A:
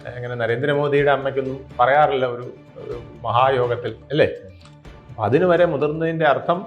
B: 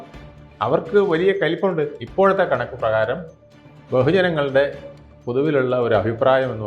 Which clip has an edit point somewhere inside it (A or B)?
B